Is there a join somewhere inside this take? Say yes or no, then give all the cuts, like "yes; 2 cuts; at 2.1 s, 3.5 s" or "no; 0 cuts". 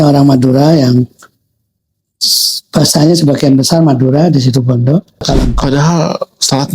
yes; 1 cut; at 5.2 s